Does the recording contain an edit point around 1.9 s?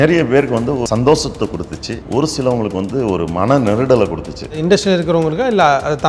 yes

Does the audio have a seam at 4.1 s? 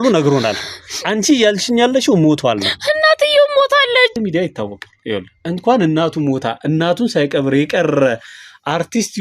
yes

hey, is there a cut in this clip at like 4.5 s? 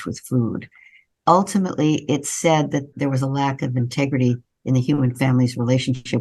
no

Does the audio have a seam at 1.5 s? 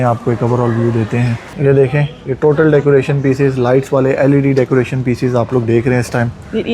yes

